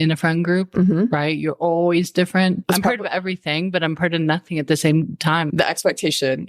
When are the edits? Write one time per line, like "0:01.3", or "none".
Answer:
0:02.6
0:05.5